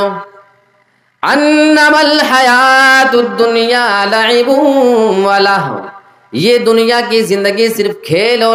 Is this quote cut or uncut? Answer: uncut